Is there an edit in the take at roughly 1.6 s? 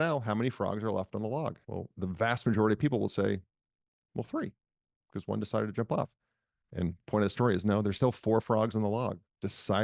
yes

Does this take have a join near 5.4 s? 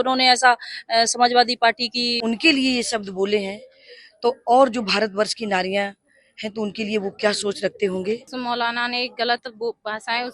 no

